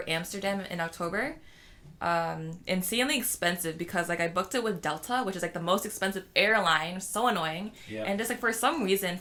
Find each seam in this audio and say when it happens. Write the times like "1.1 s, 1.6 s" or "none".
none